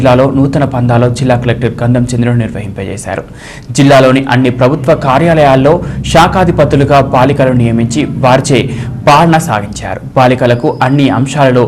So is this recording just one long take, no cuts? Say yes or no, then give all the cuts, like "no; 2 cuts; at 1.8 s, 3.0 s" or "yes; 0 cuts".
yes; 0 cuts